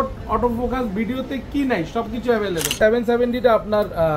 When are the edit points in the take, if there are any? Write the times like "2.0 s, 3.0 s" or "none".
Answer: 2.7 s